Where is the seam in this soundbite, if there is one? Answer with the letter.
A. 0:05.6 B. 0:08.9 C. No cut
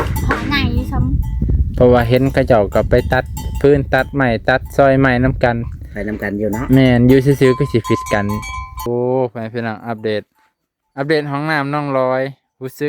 B